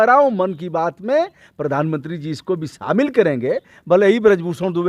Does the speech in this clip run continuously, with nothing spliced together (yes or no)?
yes